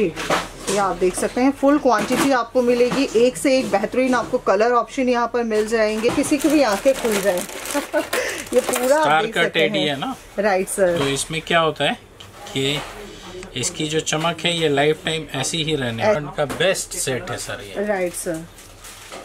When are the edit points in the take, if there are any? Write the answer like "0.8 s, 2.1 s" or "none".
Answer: 6.1 s, 16.2 s